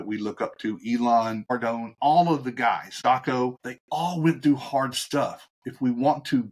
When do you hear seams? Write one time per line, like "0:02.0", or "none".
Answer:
0:01.4
0:02.9
0:03.7

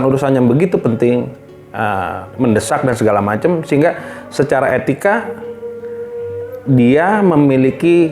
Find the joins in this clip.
none

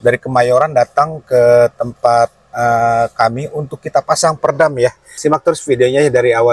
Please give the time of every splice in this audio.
0:05.1

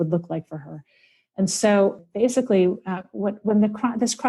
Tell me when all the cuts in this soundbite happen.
0:02.0

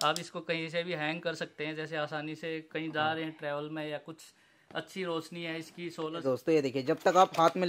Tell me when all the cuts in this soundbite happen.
0:06.2

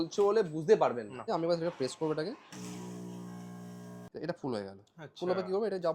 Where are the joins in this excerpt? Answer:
0:01.2
0:04.1

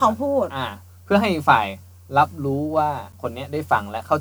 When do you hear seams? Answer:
0:03.1

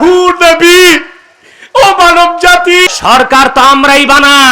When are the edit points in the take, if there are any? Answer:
0:02.9

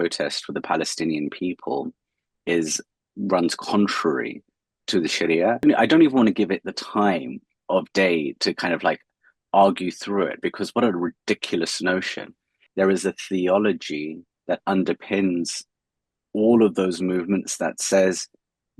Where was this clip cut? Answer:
0:05.6
0:12.6

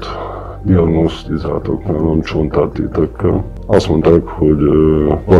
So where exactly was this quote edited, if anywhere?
0:03.5

